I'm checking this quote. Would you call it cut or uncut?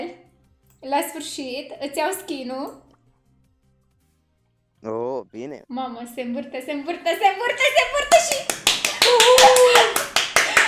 uncut